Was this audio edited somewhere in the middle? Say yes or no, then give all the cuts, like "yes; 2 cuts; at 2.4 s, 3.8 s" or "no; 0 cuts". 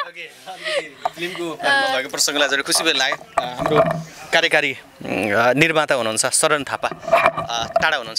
no; 0 cuts